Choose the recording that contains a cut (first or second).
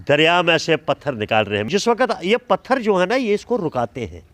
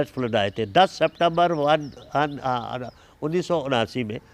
first